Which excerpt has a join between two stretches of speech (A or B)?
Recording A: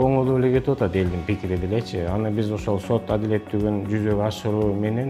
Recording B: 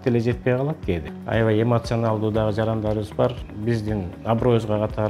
B